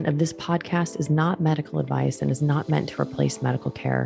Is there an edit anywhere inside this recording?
no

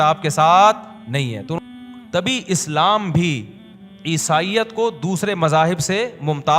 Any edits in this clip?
yes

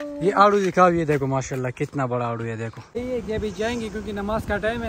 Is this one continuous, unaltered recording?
no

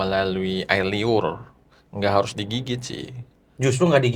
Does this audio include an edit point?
no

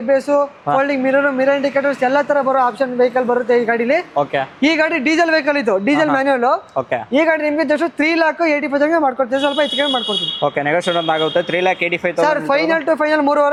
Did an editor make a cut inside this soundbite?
no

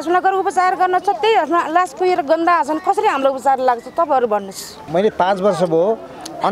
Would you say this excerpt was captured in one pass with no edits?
no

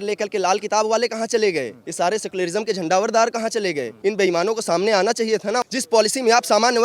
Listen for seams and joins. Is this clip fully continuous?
no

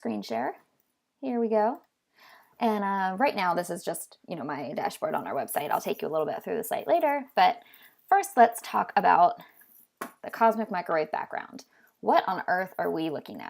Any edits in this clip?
yes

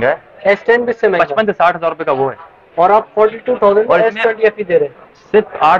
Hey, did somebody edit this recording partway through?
no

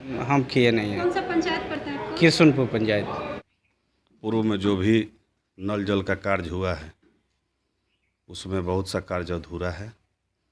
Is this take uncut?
yes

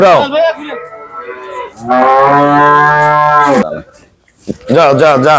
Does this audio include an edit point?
yes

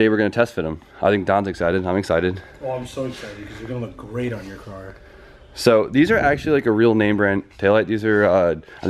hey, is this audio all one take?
yes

